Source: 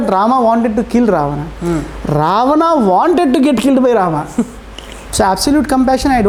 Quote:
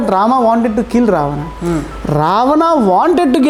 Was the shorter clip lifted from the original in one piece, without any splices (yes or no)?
yes